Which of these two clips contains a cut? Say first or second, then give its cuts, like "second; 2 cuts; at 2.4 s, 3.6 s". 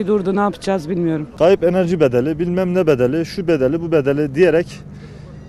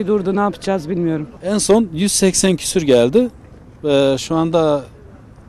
first; 1 cut; at 1.3 s